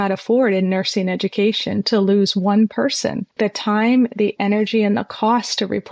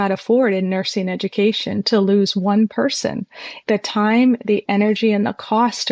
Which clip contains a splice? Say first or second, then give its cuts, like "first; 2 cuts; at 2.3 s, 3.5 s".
first; 1 cut; at 3.2 s